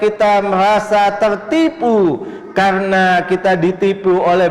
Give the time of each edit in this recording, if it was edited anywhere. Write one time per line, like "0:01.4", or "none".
none